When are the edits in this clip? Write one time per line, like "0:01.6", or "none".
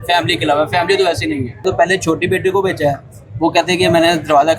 0:01.6